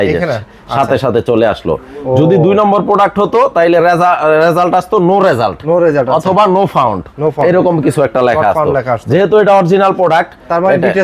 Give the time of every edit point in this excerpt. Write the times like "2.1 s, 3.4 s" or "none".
none